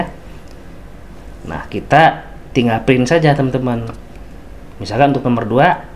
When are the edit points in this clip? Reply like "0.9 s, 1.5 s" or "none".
none

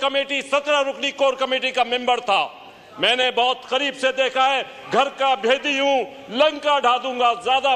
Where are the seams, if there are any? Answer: none

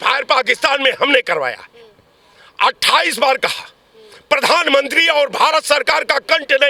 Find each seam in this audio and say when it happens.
none

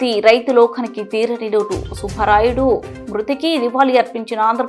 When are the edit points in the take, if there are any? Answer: none

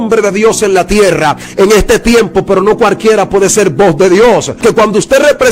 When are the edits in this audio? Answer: 4.6 s

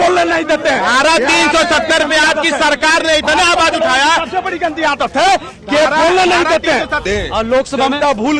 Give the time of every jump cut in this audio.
7.0 s

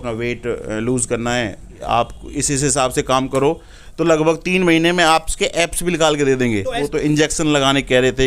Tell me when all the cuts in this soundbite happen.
1.8 s, 6.8 s

